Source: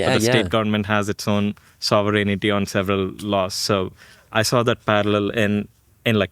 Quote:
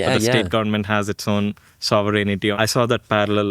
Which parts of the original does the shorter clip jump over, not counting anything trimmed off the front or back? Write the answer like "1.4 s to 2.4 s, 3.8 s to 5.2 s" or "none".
2.5 s to 4.3 s